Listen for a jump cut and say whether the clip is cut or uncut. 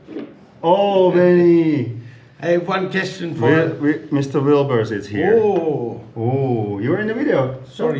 uncut